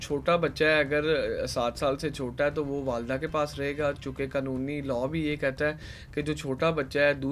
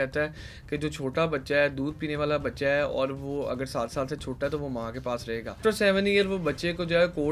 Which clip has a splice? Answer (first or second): second